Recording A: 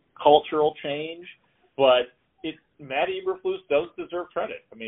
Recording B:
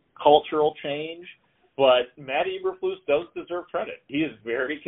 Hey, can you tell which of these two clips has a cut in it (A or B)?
B